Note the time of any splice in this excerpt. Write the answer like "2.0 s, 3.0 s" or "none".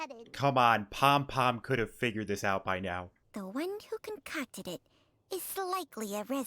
3.2 s